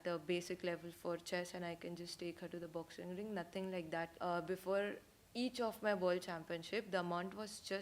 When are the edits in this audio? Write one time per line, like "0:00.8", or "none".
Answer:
0:04.1